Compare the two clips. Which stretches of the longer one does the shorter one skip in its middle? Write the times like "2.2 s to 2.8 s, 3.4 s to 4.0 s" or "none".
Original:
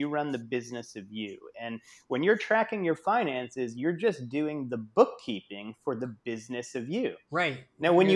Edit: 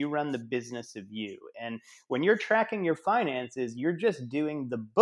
none

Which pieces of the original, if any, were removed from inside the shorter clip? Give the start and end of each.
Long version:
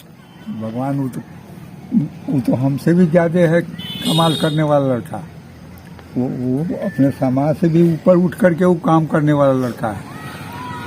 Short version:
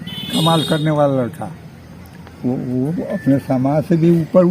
none

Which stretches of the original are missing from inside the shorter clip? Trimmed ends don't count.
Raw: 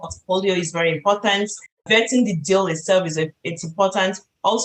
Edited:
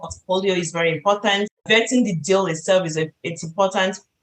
1.5 s to 1.8 s

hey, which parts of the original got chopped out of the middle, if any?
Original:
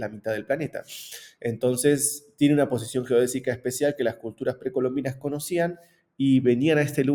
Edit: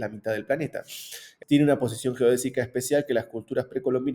1.3 s to 2.2 s

